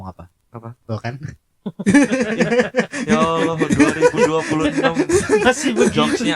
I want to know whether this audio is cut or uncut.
uncut